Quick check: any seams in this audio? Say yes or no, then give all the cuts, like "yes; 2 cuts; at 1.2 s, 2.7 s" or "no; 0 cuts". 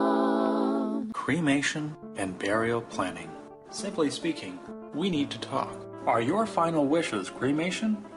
yes; 1 cut; at 1.1 s